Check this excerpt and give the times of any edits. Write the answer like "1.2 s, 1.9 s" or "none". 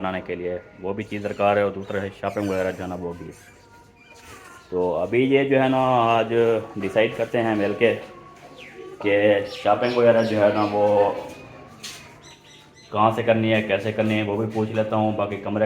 none

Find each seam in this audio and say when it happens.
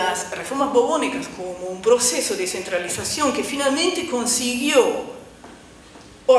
none

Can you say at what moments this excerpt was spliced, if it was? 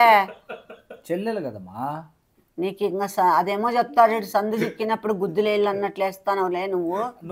none

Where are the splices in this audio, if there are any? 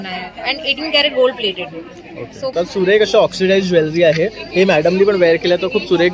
2.5 s

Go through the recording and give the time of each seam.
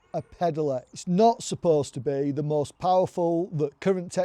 0.9 s

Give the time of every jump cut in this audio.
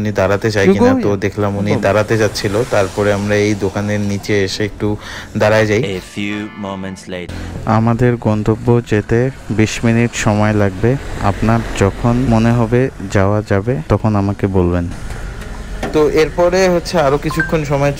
7.3 s, 12.3 s, 13.8 s

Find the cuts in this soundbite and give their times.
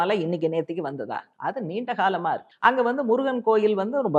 1.2 s, 2.5 s

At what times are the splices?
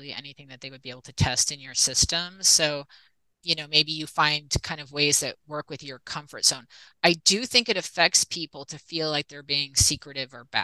none

